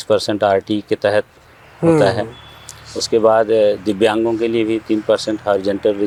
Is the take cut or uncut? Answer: uncut